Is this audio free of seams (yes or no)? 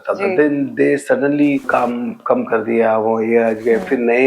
no